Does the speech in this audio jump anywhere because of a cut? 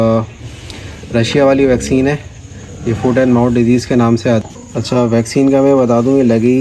yes; 1 cut; at 4.4 s

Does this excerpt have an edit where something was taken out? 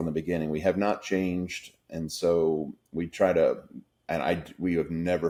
no; 0 cuts

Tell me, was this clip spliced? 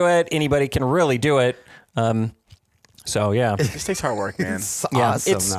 no; 0 cuts

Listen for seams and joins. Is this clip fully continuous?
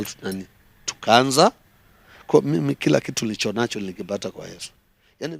yes; 0 cuts

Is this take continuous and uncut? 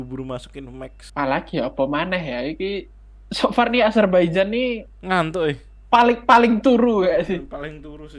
no; 1 cut; at 1.0 s

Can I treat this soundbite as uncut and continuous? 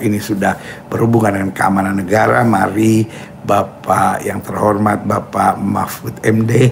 yes; 0 cuts

